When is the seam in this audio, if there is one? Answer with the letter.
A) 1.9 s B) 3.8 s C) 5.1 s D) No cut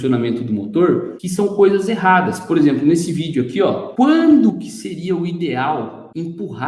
B